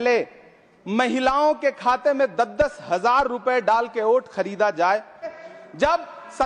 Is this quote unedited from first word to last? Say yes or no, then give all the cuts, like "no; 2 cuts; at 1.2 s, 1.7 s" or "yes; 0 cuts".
no; 1 cut; at 5.3 s